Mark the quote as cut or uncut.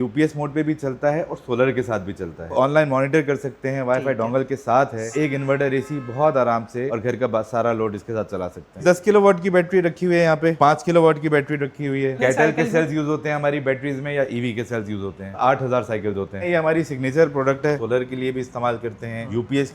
cut